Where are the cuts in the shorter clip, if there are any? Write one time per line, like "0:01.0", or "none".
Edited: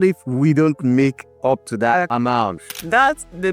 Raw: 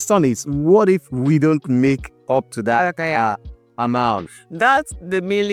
0:02.1